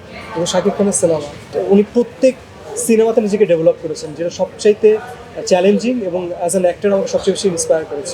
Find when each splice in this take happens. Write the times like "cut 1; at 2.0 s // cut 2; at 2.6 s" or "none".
cut 1; at 1.4 s